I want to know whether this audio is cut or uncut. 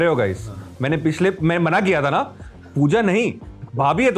uncut